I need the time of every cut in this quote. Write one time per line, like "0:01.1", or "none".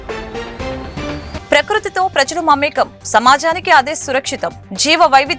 0:01.3

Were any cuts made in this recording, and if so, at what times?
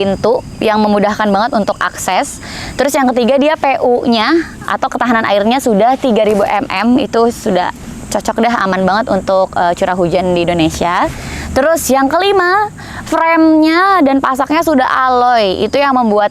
none

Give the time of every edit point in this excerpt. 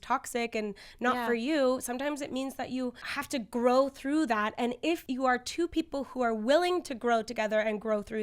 0:03.1
0:05.0

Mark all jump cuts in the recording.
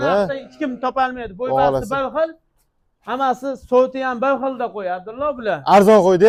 none

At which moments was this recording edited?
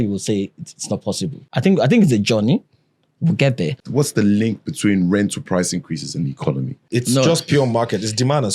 0:01.5
0:03.8
0:06.8

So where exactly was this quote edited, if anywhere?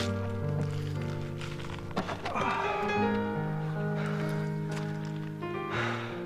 0:02.5

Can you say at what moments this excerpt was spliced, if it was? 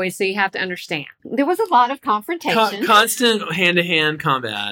0:01.2

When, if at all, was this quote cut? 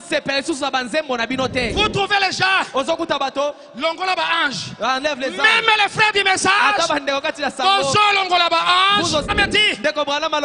0:09.3

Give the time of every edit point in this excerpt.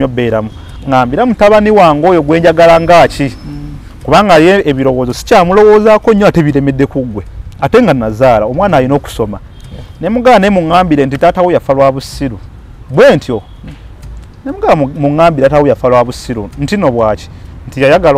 none

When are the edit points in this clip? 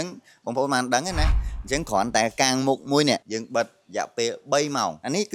none

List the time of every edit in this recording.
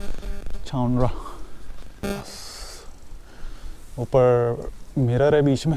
0:02.0

